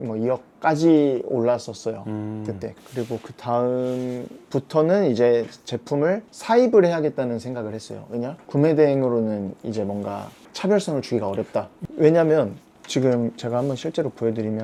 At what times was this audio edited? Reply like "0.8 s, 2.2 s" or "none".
none